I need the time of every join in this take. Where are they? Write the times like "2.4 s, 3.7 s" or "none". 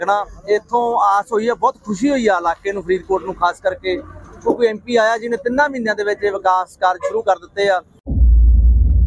8.0 s